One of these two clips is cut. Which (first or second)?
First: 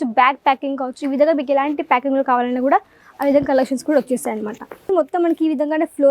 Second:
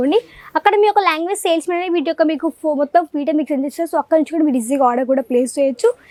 first